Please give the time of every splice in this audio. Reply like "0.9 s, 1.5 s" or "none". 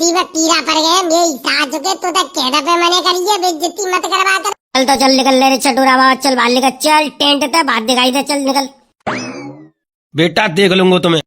4.5 s